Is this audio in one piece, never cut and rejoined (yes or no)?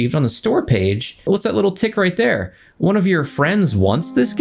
no